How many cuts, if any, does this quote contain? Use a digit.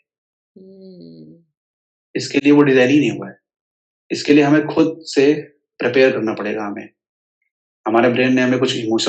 0